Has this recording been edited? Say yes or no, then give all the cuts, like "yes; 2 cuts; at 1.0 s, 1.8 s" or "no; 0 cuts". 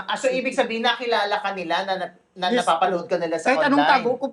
no; 0 cuts